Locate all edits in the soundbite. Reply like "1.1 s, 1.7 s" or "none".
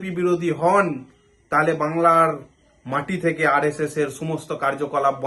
none